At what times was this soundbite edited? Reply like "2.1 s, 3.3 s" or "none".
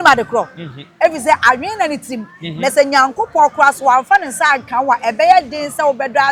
none